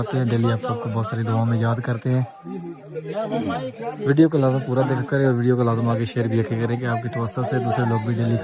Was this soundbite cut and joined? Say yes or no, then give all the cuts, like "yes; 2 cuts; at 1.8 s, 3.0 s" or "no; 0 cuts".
no; 0 cuts